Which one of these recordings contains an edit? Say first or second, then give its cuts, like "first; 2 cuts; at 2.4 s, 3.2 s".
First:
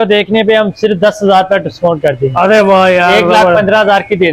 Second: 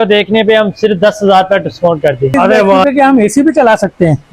second; 1 cut; at 2.8 s